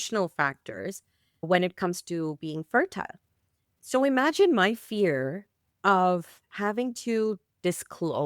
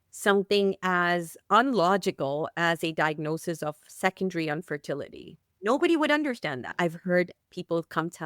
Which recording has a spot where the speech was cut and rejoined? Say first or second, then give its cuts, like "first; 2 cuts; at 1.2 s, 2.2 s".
second; 1 cut; at 6.6 s